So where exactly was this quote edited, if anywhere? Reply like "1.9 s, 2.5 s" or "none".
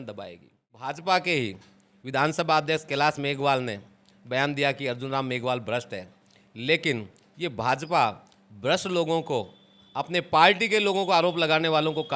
0.9 s